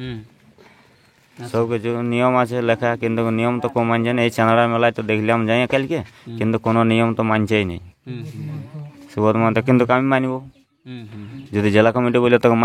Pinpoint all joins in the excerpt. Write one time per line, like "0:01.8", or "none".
none